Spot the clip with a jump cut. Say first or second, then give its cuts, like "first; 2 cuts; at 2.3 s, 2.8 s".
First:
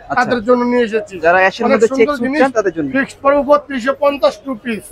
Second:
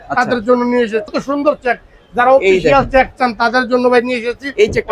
second; 1 cut; at 1.1 s